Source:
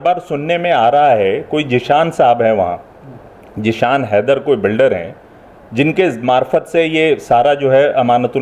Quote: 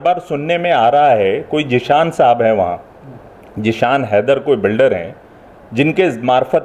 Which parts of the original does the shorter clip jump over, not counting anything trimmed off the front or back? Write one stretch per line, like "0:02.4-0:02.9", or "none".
none